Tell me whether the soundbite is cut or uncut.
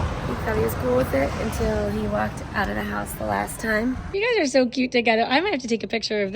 cut